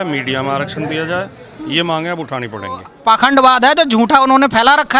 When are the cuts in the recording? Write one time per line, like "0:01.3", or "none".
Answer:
0:02.9

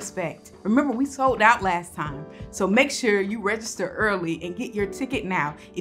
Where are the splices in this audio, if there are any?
none

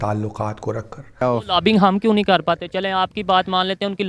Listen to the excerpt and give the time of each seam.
0:01.2

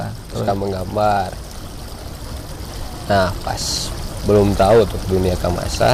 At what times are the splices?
none

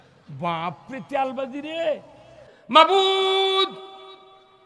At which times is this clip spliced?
0:02.5

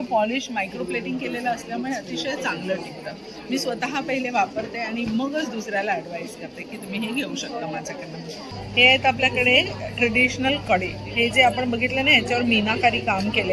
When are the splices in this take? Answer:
none

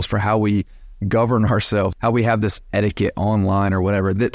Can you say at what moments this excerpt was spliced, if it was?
0:01.9

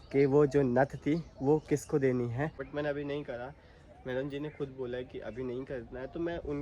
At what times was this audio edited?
0:02.6

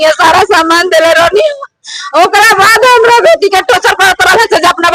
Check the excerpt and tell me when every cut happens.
none

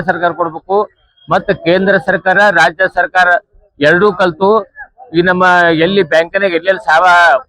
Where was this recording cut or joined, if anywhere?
none

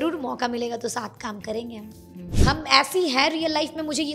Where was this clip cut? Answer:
0:02.2

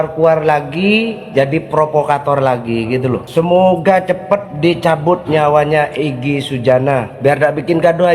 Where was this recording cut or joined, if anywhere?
0:01.2
0:03.2
0:04.5
0:07.1

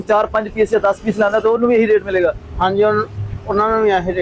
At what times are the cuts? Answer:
none

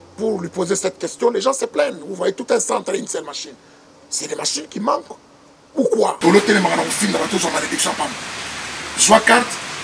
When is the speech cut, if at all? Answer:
0:06.2

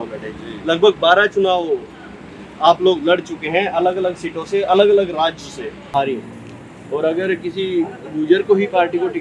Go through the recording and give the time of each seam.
0:05.8

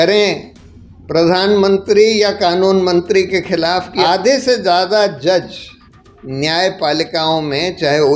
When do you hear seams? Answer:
0:04.0

